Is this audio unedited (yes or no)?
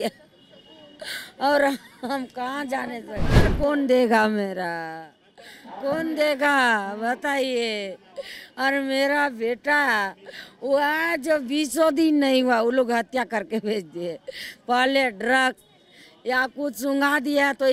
no